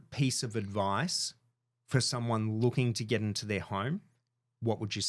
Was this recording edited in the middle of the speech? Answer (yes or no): no